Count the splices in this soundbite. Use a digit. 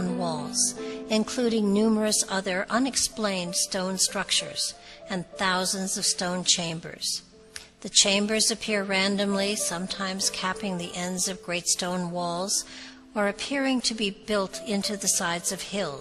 0